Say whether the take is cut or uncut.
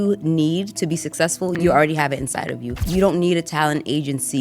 cut